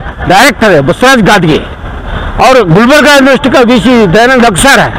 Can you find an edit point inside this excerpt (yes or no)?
no